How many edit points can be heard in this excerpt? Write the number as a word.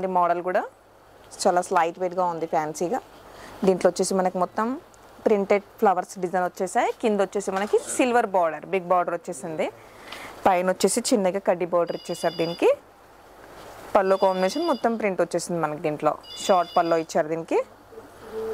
zero